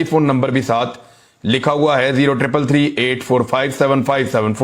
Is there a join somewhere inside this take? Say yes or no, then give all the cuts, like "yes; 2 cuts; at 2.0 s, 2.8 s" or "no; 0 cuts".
no; 0 cuts